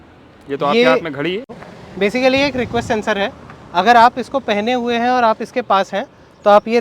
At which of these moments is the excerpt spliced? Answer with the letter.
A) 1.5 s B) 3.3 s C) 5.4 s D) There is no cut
A